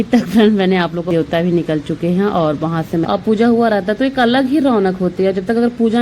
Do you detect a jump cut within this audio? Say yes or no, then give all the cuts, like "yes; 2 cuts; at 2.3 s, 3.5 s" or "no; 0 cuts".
yes; 2 cuts; at 1.1 s, 3.0 s